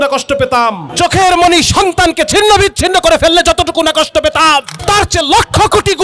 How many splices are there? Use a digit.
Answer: 2